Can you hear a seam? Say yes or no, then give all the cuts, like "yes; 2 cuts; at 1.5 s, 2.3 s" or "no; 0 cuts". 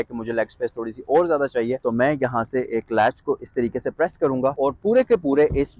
yes; 2 cuts; at 1.8 s, 4.5 s